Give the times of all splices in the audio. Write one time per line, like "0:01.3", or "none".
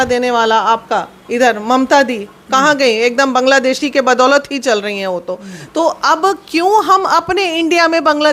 none